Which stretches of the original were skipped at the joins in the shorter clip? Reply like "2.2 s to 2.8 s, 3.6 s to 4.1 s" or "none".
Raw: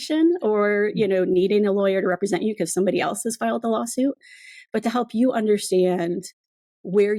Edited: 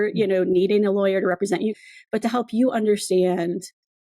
2.6 s to 4.4 s